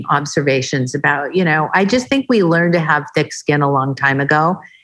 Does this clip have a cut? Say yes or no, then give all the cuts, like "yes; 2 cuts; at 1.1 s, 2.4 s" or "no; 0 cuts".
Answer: no; 0 cuts